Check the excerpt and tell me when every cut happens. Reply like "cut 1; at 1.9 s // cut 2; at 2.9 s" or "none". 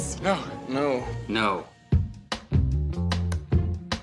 cut 1; at 1.7 s